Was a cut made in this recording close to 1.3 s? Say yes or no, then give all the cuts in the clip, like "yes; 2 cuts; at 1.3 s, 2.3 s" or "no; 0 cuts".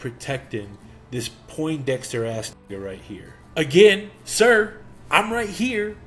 no; 1 cut; at 3.3 s